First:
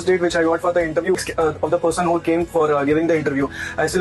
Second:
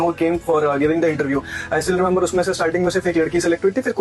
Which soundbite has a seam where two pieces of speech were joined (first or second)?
first